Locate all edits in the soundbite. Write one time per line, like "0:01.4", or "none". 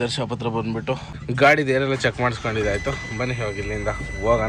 none